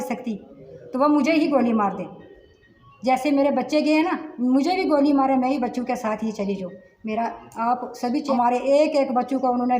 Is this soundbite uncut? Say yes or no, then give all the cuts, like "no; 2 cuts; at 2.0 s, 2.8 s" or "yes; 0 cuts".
no; 1 cut; at 8.3 s